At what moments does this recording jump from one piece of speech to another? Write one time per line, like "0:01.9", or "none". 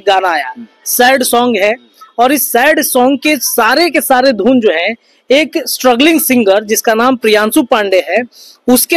none